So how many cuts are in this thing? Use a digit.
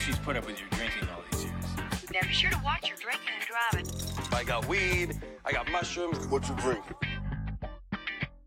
0